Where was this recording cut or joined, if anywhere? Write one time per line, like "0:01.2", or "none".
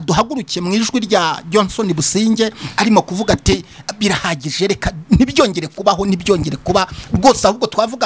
none